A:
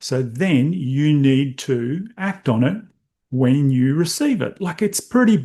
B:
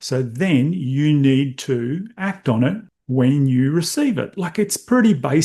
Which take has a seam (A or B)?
B